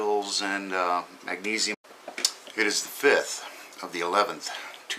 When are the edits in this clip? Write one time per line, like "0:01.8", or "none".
none